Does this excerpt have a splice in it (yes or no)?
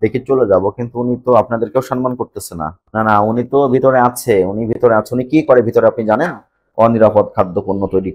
no